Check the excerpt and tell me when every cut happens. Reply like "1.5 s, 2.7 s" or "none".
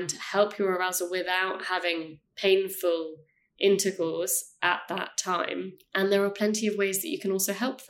5.8 s